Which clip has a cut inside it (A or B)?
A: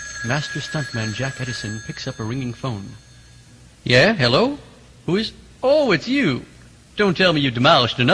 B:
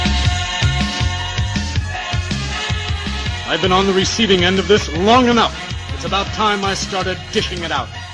A